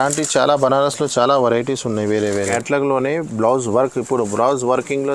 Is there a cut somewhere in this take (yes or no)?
yes